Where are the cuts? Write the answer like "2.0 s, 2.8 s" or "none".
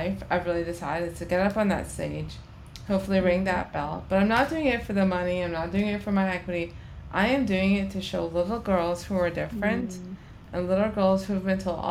none